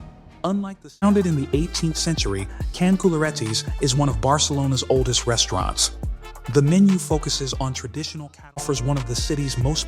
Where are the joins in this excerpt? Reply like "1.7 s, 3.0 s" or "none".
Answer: 1.0 s, 8.6 s